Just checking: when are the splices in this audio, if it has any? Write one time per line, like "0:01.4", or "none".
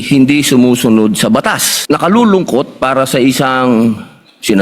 0:01.7

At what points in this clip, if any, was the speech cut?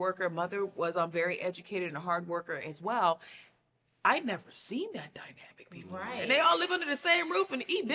none

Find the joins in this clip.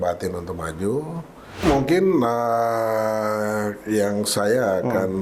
0:01.6

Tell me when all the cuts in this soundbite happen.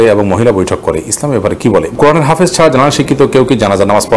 0:01.9

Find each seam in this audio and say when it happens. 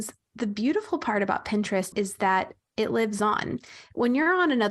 0:01.9

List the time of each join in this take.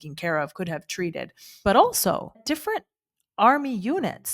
0:01.4
0:02.4

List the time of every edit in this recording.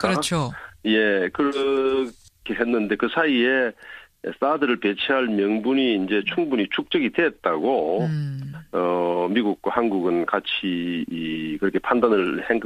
none

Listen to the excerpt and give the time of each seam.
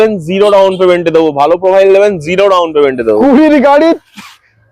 none

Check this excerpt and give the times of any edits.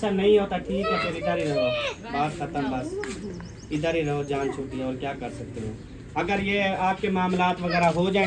none

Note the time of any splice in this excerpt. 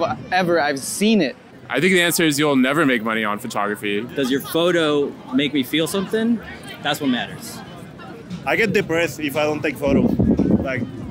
0:01.4
0:04.1
0:08.2

